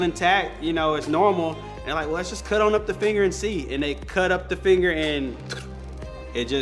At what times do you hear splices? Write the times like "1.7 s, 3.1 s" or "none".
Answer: none